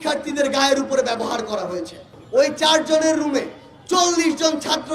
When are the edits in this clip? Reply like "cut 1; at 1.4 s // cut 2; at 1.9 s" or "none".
cut 1; at 2.1 s